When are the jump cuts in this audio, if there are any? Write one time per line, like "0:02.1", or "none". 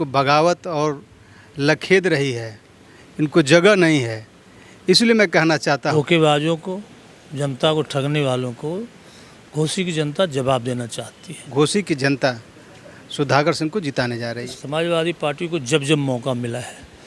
0:05.9
0:11.4
0:14.6